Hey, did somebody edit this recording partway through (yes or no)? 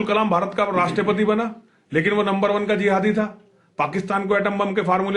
no